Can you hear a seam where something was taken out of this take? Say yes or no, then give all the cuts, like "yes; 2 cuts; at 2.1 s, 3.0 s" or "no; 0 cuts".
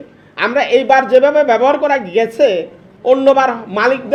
no; 0 cuts